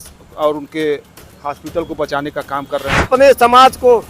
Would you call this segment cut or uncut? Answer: cut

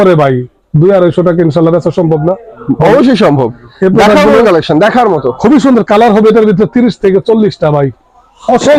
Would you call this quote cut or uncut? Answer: uncut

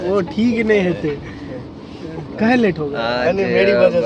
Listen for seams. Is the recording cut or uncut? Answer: uncut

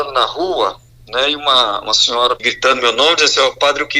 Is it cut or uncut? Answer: cut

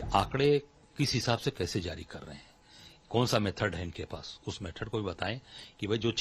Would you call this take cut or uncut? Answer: uncut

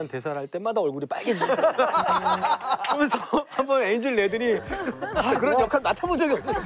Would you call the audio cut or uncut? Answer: uncut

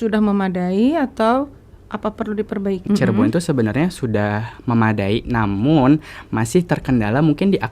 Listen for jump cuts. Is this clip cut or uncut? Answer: cut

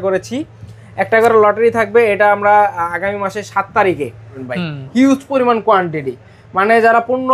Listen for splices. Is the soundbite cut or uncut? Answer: cut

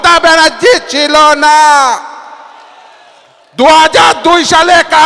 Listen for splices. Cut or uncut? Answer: uncut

